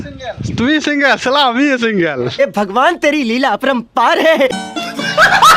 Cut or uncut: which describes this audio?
cut